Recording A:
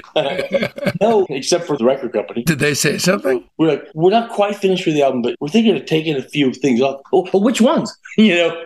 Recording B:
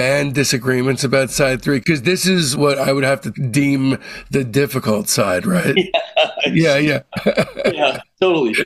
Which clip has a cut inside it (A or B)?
A